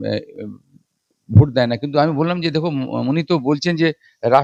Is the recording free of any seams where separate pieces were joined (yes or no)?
yes